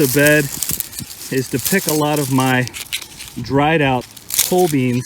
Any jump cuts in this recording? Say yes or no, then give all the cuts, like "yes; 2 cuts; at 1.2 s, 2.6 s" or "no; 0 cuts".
yes; 1 cut; at 4.1 s